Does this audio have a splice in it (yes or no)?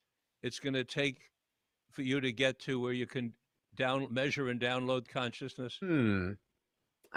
no